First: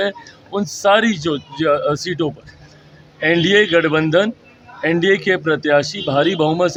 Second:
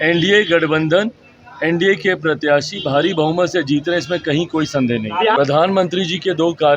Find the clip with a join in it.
second; 1 cut; at 5.3 s

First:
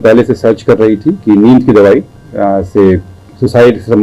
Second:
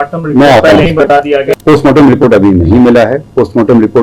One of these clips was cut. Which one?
second; 1 cut; at 1.5 s

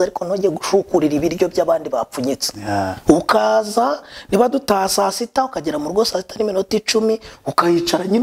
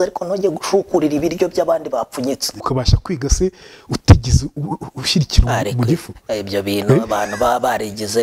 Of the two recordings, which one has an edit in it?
second; 1 cut; at 2.6 s

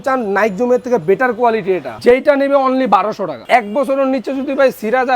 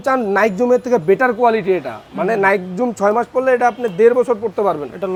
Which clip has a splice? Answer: first; 2 cuts; at 1.9 s, 3.4 s

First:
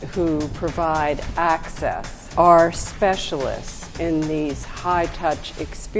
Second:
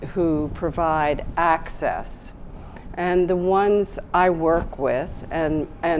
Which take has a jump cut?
first; 1 cut; at 2.1 s

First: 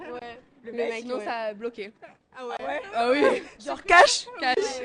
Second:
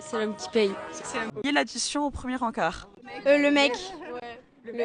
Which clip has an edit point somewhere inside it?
second; 1 cut; at 1.3 s

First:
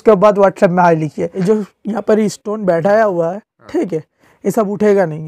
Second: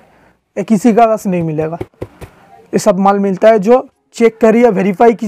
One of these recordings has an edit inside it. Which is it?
first; 1 cut; at 1.4 s

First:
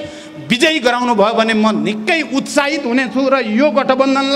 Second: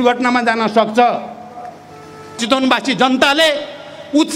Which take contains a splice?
second; 1 cut; at 2.4 s

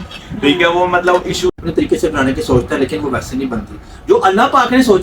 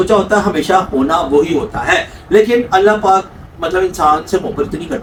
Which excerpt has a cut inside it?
first; 1 cut; at 1.5 s

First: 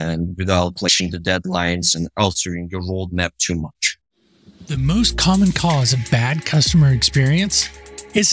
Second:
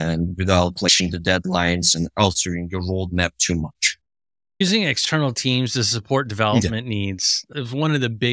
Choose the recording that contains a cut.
first; 1 cut; at 4.4 s

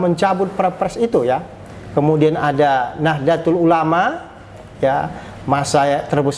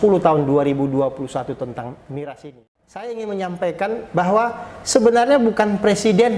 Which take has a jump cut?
second; 1 cut; at 3.0 s

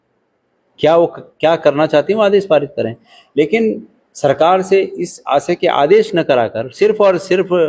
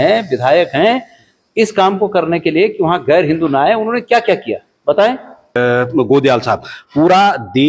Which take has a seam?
second; 1 cut; at 5.6 s

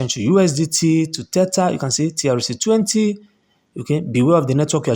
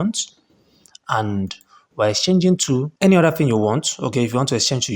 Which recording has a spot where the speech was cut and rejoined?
second; 1 cut; at 2.9 s

